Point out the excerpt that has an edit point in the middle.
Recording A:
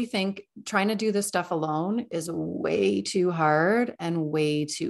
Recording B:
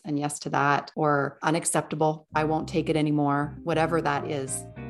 B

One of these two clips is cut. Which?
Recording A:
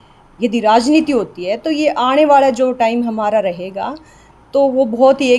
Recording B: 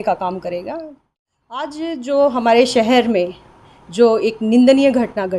B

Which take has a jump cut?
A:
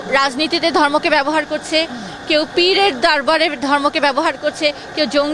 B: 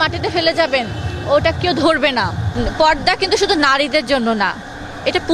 B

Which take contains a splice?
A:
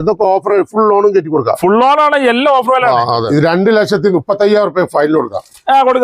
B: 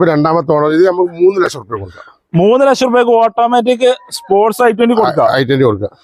A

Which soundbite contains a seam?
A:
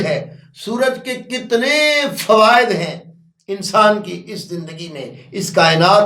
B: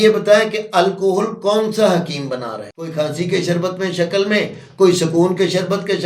B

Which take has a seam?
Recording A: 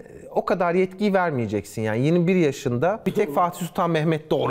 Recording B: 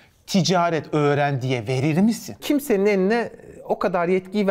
B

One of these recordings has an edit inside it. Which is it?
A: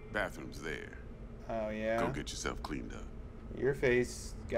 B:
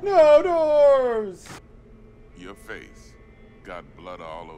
B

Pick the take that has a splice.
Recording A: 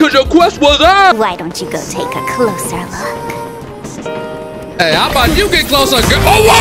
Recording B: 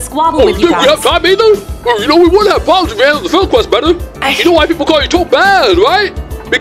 A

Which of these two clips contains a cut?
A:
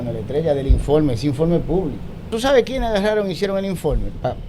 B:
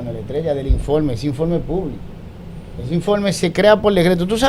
A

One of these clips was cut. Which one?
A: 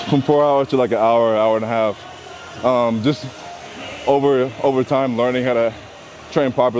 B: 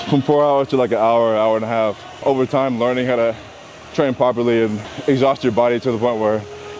B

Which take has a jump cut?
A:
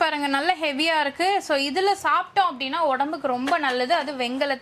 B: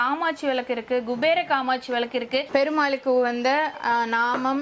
B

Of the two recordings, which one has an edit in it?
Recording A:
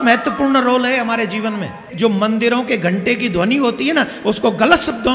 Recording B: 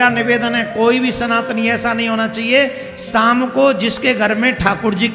A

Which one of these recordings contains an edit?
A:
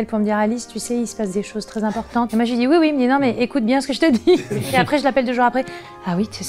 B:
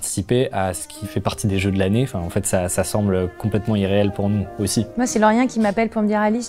B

